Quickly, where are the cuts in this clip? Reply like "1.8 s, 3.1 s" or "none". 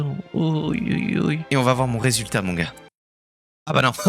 1.4 s